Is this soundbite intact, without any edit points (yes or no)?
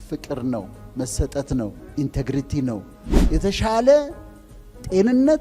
no